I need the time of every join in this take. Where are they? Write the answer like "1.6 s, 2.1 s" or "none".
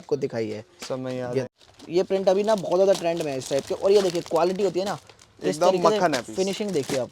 1.4 s